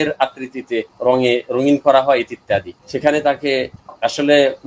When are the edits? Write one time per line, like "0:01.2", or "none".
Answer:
none